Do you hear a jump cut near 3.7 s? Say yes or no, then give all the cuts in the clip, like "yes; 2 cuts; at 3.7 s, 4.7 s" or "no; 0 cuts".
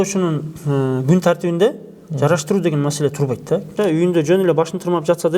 yes; 1 cut; at 3.7 s